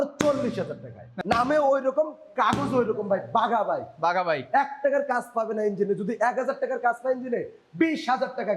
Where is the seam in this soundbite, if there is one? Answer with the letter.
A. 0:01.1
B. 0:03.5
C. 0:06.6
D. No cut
A